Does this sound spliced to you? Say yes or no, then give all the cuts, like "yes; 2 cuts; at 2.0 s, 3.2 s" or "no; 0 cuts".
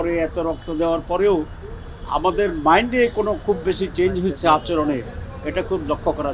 no; 0 cuts